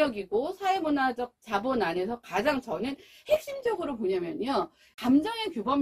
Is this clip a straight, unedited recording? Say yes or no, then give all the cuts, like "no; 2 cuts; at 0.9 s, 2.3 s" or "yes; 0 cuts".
no; 1 cut; at 4.9 s